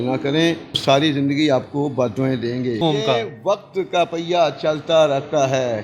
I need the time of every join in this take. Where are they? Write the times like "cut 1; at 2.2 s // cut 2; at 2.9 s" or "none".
cut 1; at 0.8 s // cut 2; at 2.8 s